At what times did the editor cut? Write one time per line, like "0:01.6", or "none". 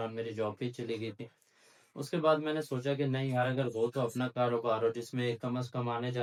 none